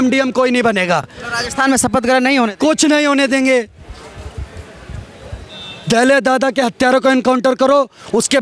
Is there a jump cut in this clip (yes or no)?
no